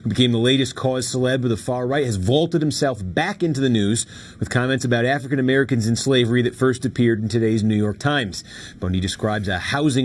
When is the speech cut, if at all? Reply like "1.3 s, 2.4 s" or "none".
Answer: 5.2 s

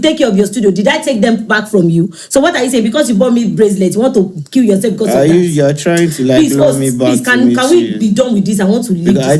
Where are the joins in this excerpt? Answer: none

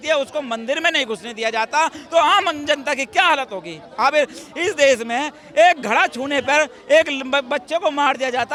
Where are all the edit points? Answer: none

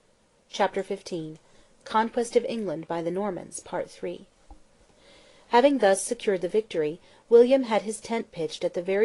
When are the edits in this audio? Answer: 6.0 s

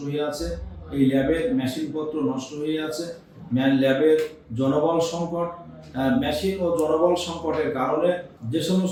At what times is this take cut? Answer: none

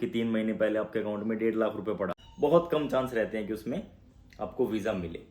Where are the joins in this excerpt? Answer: 2.2 s

